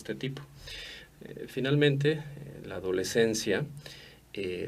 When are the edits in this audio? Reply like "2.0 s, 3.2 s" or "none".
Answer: 2.6 s